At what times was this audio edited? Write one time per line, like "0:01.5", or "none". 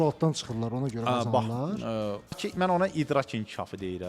0:02.4